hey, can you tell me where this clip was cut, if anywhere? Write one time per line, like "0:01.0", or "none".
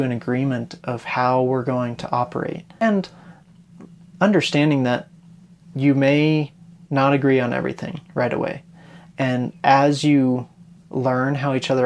0:02.8